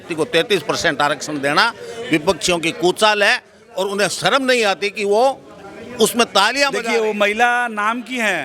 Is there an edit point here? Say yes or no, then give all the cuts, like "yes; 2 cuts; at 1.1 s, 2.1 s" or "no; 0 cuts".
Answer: yes; 1 cut; at 6.9 s